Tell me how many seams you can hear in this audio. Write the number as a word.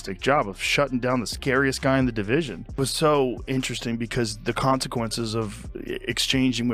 zero